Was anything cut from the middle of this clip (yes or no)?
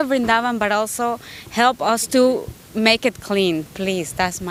no